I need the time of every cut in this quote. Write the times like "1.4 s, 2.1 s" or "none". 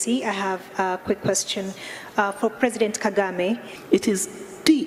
3.7 s